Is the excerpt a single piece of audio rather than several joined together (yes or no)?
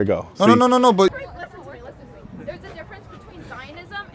no